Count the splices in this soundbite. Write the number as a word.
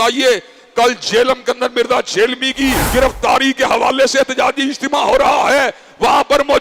one